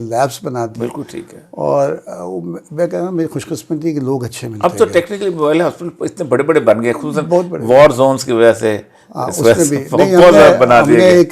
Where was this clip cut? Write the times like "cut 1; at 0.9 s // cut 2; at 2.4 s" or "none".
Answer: none